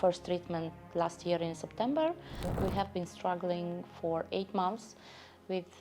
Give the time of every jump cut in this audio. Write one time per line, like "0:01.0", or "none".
0:02.5